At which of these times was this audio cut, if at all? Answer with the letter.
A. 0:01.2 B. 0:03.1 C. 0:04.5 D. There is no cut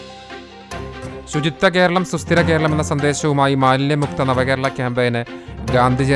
A